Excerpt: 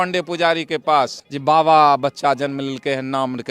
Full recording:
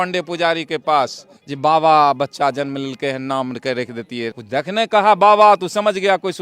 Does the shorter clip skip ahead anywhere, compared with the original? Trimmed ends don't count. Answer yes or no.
yes